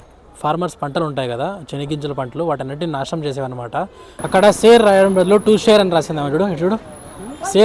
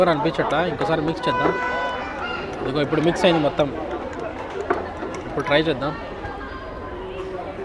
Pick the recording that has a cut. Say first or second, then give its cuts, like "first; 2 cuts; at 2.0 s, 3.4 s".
first; 1 cut; at 4.1 s